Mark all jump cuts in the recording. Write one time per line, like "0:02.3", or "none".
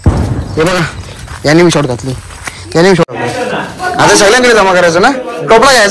0:03.1